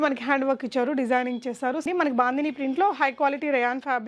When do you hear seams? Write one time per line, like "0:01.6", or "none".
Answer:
0:01.8